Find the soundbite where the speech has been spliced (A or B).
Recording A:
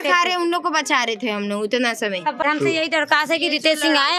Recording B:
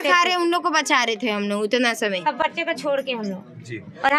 A